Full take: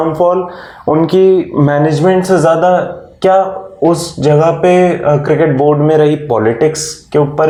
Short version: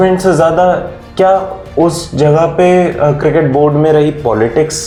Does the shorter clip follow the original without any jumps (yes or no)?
yes